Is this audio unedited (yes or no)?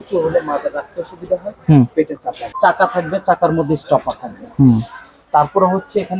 no